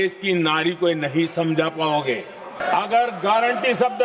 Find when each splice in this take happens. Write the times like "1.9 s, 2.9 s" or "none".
2.6 s